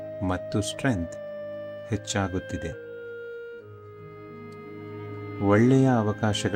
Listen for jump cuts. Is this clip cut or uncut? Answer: uncut